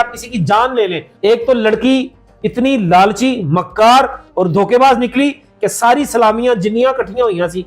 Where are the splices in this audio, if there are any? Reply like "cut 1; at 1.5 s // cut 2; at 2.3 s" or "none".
cut 1; at 1.1 s